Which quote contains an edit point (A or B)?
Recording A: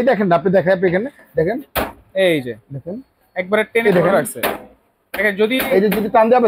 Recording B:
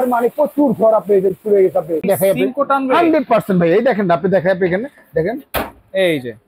B